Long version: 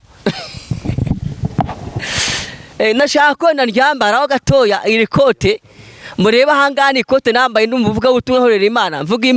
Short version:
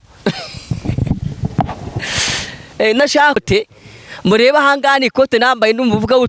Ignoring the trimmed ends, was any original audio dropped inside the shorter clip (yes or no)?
yes